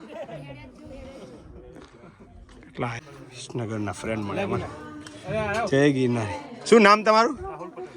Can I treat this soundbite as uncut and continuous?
no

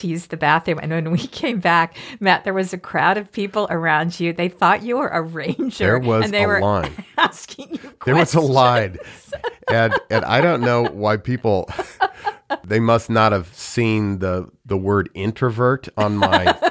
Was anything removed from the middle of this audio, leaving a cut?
yes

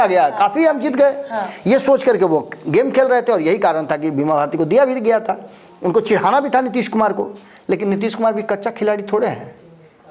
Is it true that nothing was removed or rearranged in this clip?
yes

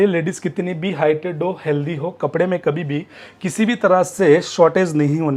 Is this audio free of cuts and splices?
yes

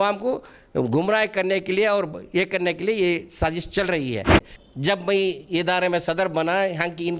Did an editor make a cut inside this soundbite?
yes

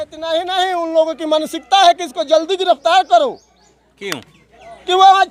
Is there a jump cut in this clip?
no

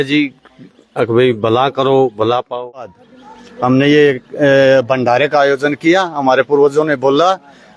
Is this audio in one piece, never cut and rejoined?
no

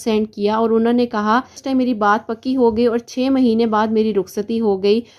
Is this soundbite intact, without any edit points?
no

